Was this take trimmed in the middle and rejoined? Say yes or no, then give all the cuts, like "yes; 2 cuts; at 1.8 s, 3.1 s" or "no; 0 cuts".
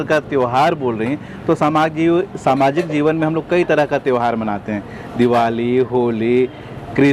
no; 0 cuts